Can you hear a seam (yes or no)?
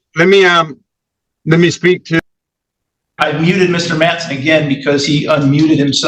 no